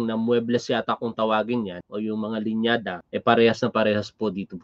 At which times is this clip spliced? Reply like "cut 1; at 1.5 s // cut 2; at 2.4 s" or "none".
cut 1; at 1.8 s // cut 2; at 3.0 s